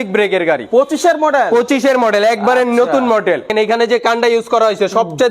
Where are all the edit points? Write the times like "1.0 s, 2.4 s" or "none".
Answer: 3.5 s

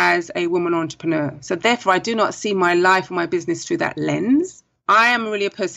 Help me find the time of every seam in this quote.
none

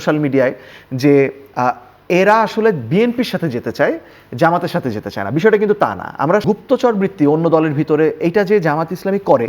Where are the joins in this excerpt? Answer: 6.4 s

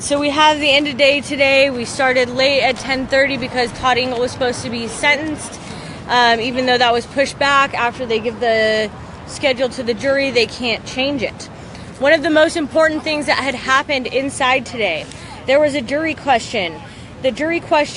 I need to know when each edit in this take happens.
none

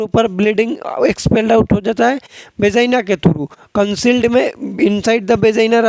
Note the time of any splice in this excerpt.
none

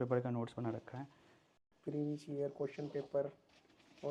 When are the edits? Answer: none

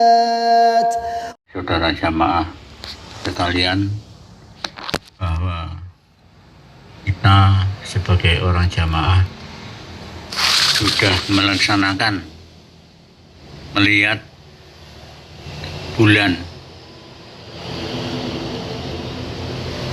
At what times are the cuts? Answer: 1.3 s

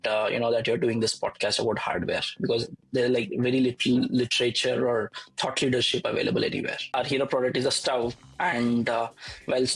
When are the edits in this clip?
6.9 s

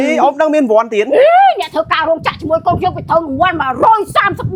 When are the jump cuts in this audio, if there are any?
none

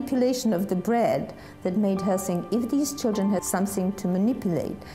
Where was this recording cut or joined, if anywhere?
3.4 s

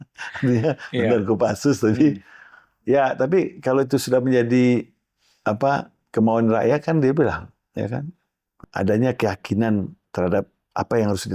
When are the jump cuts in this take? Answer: 8.6 s

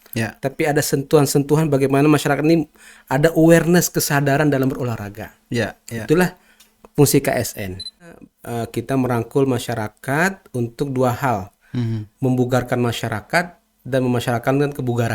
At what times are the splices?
8.1 s

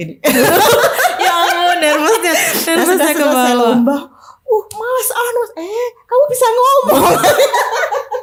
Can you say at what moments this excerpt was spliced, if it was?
none

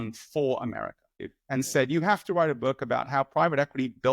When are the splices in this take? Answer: 1.2 s

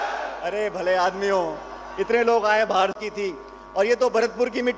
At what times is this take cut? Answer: 3.0 s

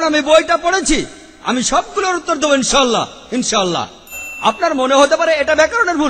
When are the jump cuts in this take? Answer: 4.3 s

